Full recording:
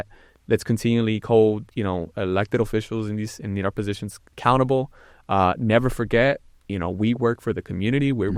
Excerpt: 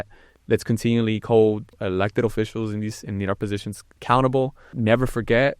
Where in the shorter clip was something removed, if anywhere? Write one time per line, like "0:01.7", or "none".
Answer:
0:01.7
0:04.8